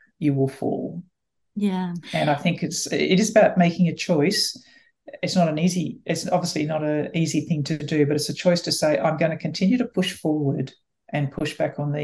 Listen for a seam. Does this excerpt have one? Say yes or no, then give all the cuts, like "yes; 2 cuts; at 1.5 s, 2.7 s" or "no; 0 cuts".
no; 0 cuts